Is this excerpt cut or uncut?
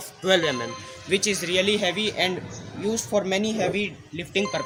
uncut